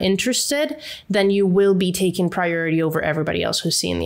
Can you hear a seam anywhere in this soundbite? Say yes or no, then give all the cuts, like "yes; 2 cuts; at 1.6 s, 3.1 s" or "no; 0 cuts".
no; 0 cuts